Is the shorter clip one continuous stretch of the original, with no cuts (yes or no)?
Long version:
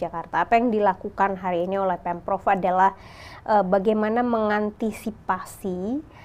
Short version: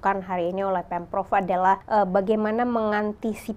no